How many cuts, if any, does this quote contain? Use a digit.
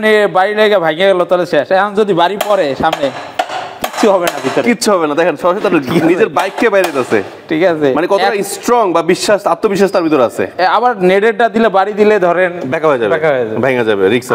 0